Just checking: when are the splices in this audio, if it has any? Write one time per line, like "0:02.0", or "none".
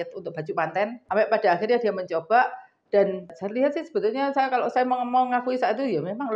0:01.0
0:03.4